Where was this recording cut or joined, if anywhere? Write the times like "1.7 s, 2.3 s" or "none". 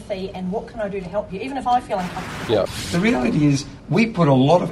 2.8 s